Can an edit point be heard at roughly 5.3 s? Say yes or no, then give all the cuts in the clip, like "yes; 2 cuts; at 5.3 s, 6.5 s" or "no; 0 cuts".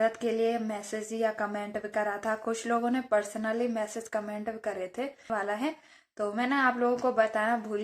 yes; 1 cut; at 5.3 s